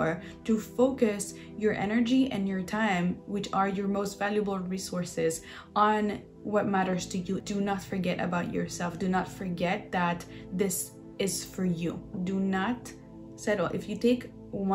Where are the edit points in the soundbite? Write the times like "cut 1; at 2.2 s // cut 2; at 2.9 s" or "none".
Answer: cut 1; at 7.4 s // cut 2; at 12.1 s